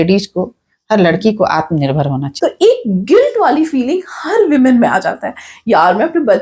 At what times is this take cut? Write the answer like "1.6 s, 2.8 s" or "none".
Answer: 2.3 s